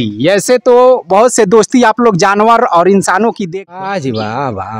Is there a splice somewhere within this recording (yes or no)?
yes